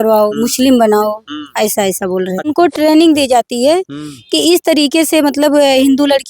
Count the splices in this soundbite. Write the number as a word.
one